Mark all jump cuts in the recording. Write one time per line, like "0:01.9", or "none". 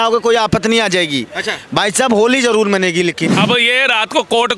0:03.3